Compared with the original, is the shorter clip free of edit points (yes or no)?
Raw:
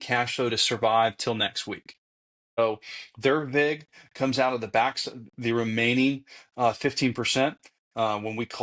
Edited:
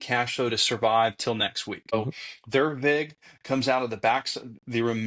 no